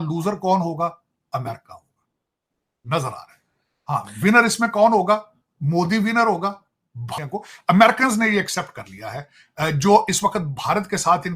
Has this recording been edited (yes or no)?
yes